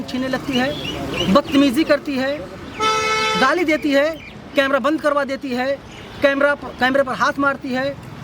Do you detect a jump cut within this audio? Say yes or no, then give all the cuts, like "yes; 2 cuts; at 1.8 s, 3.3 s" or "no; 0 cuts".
no; 0 cuts